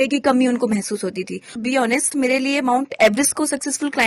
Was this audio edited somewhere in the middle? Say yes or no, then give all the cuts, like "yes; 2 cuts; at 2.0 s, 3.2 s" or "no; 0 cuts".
yes; 1 cut; at 1.6 s